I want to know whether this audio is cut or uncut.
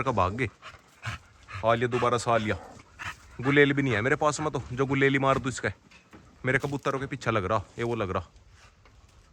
uncut